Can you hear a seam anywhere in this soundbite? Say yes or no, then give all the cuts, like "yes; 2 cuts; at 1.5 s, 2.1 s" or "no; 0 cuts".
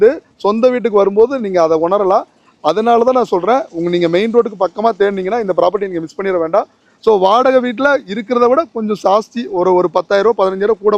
no; 0 cuts